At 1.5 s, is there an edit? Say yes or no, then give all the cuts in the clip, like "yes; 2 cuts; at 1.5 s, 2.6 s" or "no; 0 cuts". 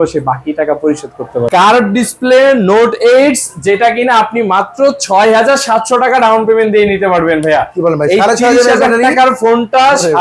yes; 1 cut; at 1.5 s